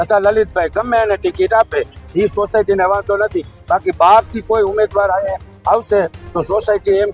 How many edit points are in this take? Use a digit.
0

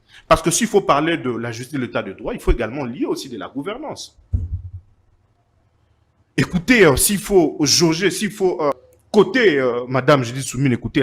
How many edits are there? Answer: 1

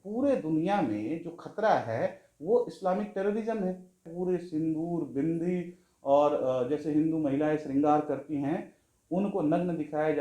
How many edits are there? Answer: 1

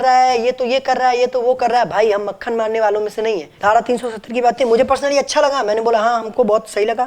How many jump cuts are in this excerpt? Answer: 1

